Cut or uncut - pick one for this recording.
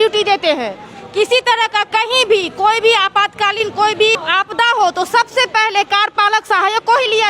cut